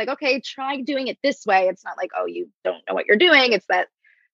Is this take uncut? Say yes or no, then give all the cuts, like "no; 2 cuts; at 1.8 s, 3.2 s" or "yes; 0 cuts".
yes; 0 cuts